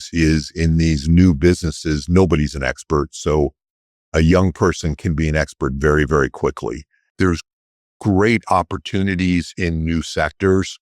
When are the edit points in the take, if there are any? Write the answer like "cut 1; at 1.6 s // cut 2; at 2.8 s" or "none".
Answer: cut 1; at 7.0 s